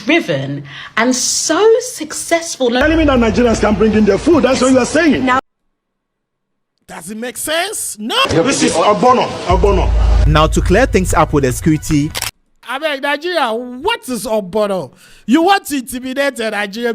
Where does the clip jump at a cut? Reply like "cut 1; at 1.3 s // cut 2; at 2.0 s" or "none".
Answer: cut 1; at 2.8 s // cut 2; at 8.2 s